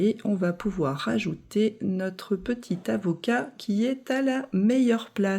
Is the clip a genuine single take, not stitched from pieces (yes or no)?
yes